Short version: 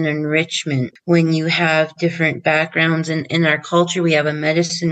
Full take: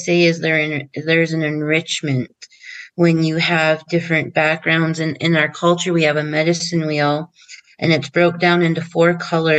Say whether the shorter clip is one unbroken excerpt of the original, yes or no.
no